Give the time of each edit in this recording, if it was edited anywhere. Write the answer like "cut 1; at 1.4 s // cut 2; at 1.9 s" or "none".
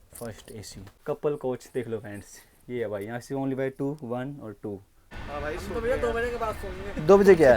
cut 1; at 5.1 s